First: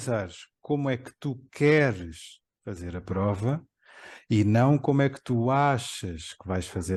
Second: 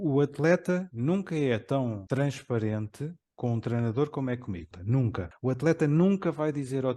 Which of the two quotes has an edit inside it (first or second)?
second